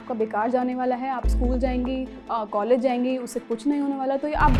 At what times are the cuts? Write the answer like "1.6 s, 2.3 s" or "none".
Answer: none

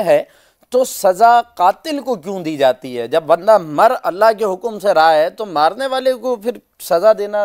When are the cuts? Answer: none

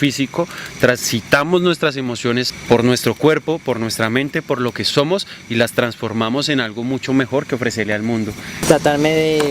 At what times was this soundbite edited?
2.5 s, 8.6 s

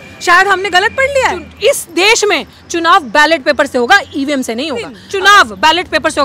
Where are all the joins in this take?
1.5 s, 5.0 s

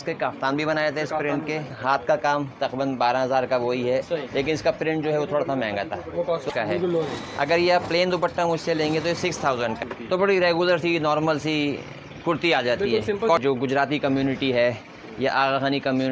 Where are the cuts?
1.7 s, 6.5 s, 9.8 s, 13.4 s

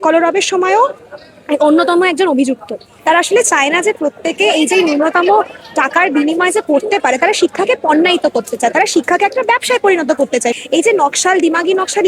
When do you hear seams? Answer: 2.9 s, 10.5 s

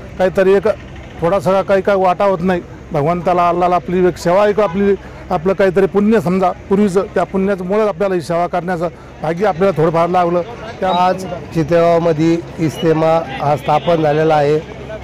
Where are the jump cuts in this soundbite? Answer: 10.9 s

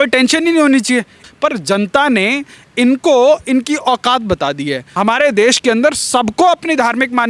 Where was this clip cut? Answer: 1.2 s, 4.8 s

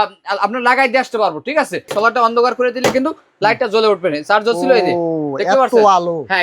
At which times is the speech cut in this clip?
1.9 s

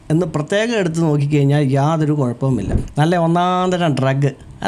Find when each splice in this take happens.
2.8 s

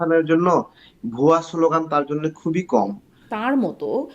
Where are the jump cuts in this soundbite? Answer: 3.2 s

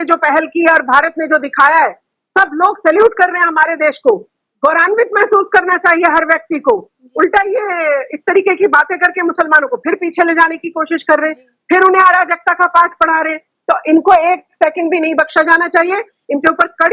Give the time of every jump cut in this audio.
none

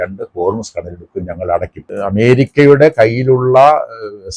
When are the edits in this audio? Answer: 1.8 s

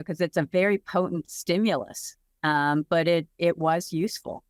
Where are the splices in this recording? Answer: none

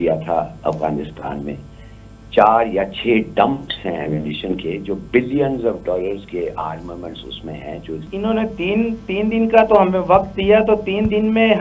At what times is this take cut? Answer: 8.1 s

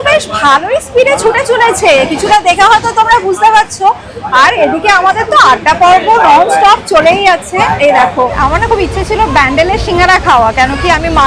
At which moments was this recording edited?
8.3 s

